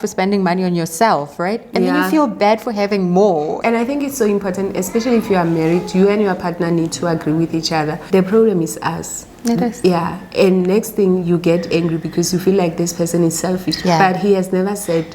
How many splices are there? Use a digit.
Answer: 2